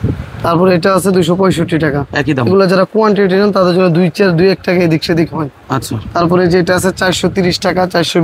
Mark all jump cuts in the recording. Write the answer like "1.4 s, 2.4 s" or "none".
none